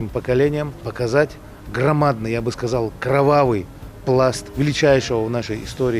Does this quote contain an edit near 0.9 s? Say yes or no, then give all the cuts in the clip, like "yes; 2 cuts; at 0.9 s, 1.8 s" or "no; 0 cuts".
yes; 2 cuts; at 0.9 s, 4.5 s